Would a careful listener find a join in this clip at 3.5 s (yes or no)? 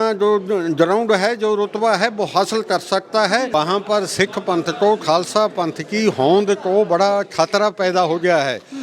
yes